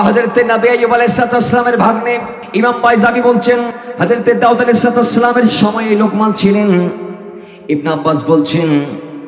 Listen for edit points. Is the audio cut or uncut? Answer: cut